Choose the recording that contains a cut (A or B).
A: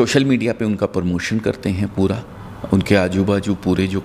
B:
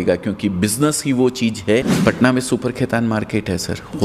B